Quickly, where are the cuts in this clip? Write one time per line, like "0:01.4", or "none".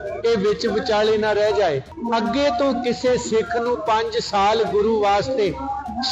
0:01.9